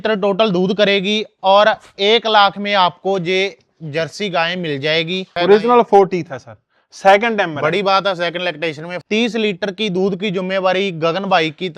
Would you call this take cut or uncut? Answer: cut